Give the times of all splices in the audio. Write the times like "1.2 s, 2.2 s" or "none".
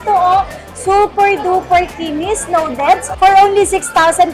3.1 s